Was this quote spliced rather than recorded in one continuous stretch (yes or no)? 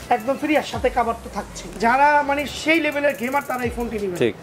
yes